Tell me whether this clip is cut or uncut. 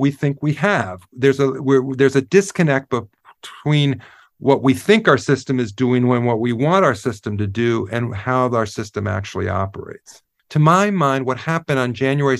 cut